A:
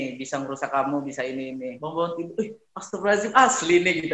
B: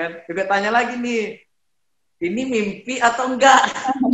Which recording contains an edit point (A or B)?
A